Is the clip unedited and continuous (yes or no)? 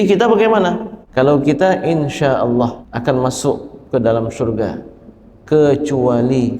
no